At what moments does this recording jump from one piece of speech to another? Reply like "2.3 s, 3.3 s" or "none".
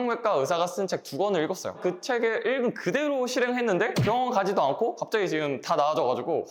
1.8 s